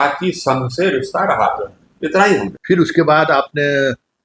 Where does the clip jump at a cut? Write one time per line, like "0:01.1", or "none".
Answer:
0:02.5